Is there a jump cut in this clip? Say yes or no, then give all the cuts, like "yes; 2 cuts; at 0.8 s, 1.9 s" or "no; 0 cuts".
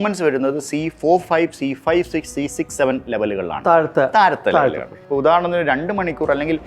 yes; 1 cut; at 4.9 s